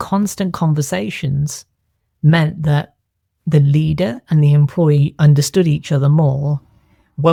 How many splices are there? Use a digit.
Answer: 0